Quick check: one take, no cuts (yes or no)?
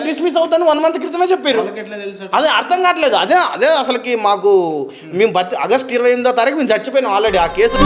yes